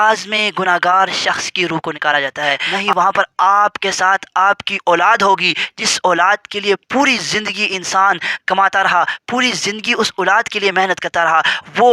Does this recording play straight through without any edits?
no; 1 cut; at 2.7 s

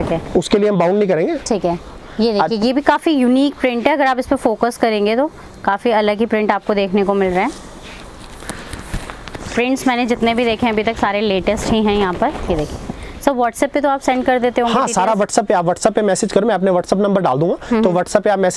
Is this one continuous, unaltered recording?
yes; 0 cuts

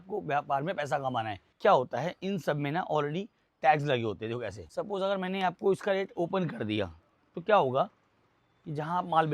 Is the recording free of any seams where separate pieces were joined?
no; 2 cuts; at 1.4 s, 4.6 s

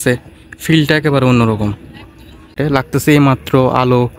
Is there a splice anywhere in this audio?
yes; 1 cut; at 2.6 s

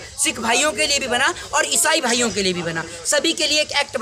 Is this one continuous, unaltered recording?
yes; 0 cuts

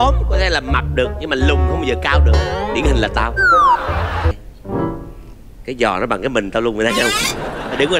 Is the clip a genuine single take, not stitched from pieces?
no; 1 cut; at 4.3 s

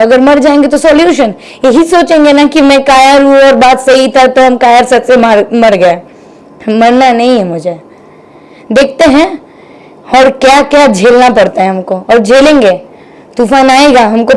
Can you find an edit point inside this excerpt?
no; 0 cuts

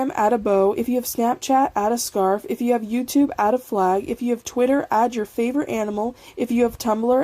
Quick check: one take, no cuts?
no; 3 cuts; at 2.5 s, 4.1 s, 6.2 s

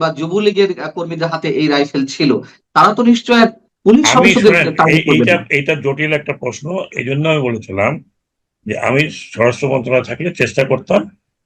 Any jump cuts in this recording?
yes; 1 cut; at 3.7 s

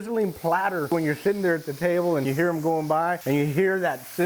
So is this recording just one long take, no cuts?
no; 3 cuts; at 0.9 s, 2.3 s, 3.2 s

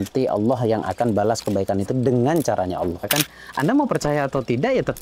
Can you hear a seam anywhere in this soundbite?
yes; 1 cut; at 3.1 s

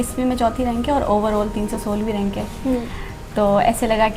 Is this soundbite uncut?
yes; 0 cuts

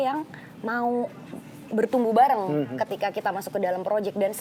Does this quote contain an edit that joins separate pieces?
no; 0 cuts

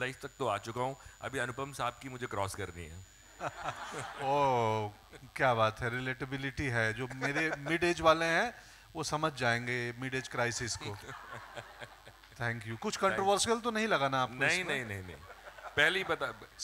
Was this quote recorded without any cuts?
yes; 0 cuts

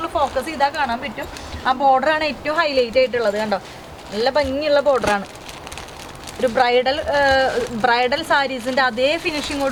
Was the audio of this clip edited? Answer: no; 0 cuts

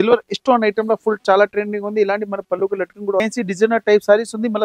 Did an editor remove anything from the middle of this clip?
yes; 1 cut; at 3.2 s

